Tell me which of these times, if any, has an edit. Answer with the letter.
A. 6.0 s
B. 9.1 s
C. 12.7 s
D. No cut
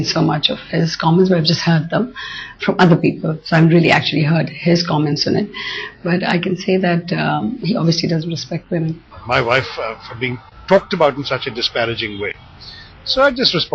B